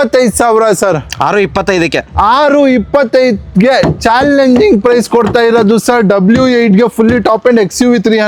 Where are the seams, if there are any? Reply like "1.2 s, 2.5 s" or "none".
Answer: none